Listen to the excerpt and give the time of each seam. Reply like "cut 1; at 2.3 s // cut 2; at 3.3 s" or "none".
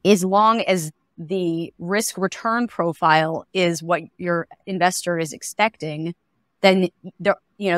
cut 1; at 1.1 s // cut 2; at 4.2 s